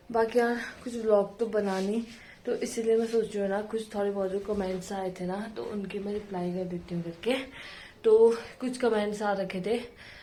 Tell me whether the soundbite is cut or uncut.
uncut